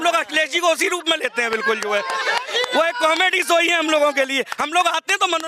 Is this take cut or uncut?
uncut